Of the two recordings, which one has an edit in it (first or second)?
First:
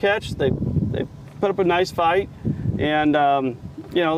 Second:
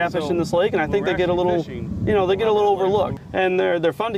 second